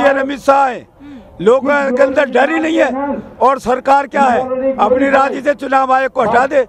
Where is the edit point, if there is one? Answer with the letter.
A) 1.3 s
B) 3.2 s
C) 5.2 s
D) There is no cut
D